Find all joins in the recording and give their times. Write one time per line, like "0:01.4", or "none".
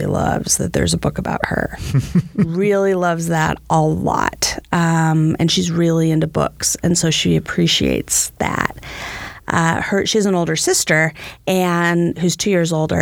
none